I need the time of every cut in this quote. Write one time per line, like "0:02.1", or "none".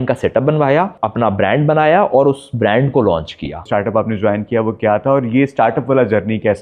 0:01.0
0:03.7